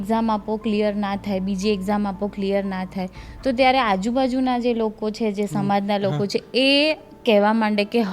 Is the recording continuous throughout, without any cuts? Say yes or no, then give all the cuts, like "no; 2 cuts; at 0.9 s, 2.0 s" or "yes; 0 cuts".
yes; 0 cuts